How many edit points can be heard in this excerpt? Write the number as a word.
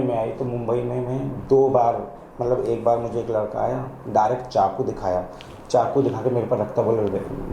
zero